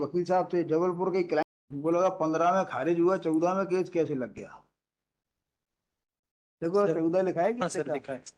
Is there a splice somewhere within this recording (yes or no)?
yes